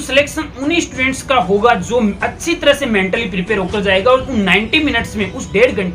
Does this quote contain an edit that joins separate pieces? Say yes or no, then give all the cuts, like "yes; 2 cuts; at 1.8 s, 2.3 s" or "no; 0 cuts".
no; 0 cuts